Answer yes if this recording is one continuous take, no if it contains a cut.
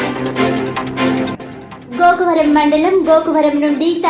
yes